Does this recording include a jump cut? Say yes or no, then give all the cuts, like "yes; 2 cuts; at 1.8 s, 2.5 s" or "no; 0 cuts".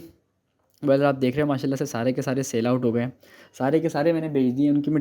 no; 0 cuts